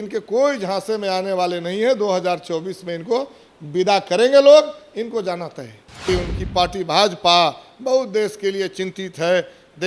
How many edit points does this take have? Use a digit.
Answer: 1